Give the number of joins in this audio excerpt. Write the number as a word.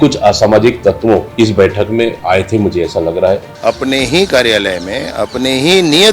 three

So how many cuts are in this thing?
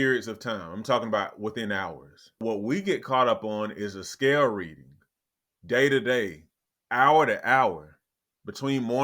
one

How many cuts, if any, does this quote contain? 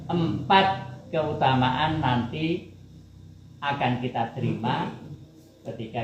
zero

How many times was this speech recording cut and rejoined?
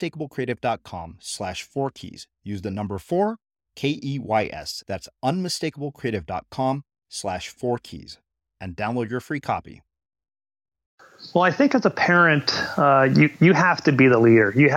one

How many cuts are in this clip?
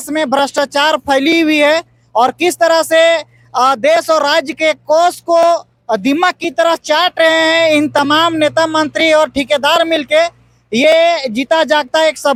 zero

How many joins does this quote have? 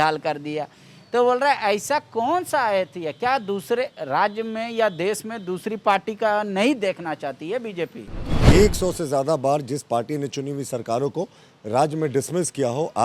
one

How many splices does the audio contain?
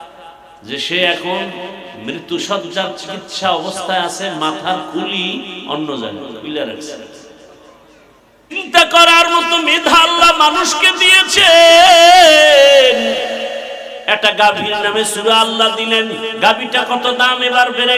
one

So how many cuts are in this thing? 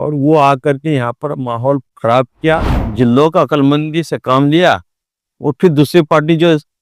one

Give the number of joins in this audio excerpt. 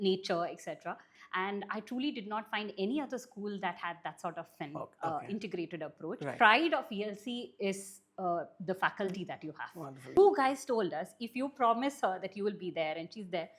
three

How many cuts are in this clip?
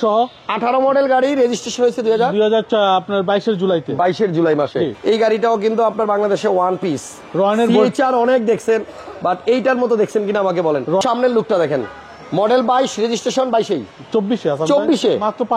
two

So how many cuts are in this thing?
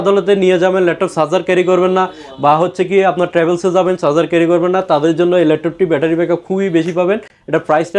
zero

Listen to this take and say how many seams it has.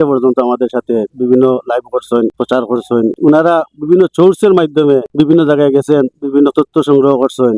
one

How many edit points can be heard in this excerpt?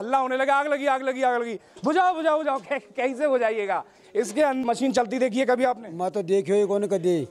one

